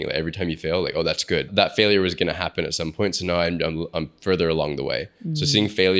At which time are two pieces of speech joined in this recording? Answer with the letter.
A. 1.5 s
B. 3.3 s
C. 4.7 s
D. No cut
A